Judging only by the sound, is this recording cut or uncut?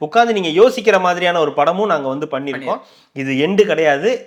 uncut